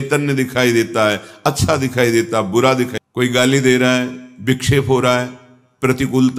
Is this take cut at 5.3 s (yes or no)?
no